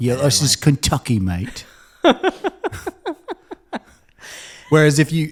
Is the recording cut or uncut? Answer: uncut